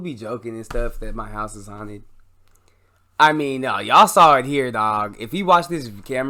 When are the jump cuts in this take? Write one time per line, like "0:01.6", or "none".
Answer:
none